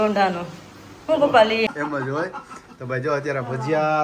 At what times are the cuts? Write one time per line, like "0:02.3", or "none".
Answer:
0:01.7